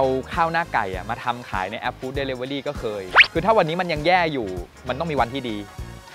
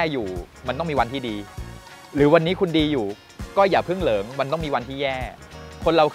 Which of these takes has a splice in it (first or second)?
first